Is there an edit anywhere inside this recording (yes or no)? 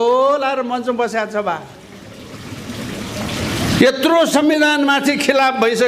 no